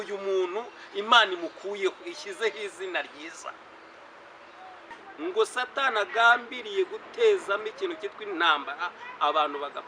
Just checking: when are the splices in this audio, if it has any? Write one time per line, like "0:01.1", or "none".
0:05.0